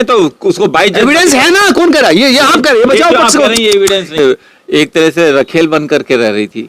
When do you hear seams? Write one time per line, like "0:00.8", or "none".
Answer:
0:04.2